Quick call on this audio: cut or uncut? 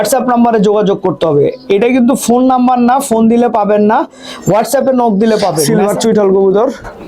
cut